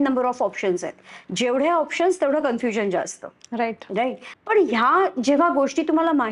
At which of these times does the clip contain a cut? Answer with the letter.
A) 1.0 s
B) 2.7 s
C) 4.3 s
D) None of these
C